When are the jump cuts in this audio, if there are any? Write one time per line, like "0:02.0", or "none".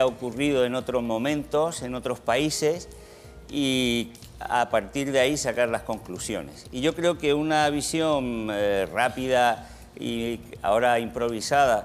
0:08.4